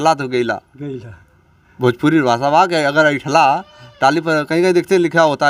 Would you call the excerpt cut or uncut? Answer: uncut